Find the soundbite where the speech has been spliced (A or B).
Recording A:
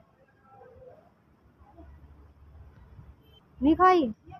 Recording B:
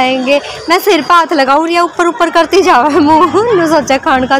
A